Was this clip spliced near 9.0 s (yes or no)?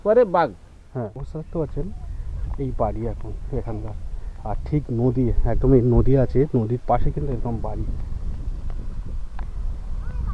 no